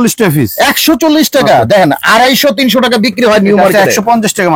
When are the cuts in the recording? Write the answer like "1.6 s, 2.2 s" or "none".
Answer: none